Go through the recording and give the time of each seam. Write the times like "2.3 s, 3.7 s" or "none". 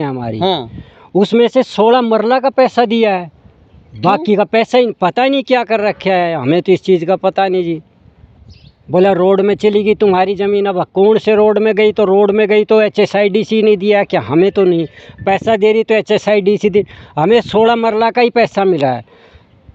none